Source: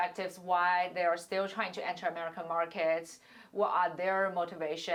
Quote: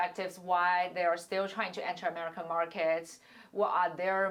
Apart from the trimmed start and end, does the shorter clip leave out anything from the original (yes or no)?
no